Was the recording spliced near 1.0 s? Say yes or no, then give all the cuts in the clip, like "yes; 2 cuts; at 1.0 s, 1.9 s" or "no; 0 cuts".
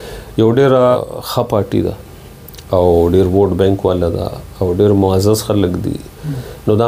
yes; 1 cut; at 1.0 s